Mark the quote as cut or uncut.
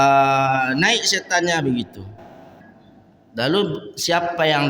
cut